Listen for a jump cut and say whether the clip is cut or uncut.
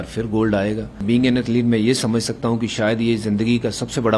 cut